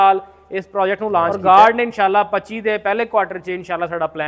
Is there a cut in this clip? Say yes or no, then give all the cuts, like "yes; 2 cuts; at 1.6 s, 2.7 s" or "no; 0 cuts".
yes; 1 cut; at 1.3 s